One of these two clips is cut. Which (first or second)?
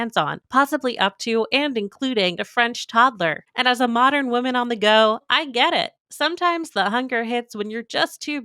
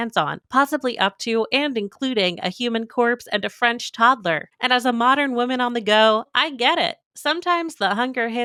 first